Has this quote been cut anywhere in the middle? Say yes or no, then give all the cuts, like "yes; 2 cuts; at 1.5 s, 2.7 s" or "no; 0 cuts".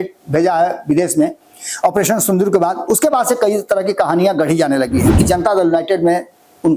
yes; 1 cut; at 5.1 s